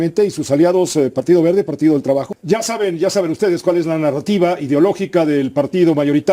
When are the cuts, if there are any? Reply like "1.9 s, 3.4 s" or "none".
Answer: 2.3 s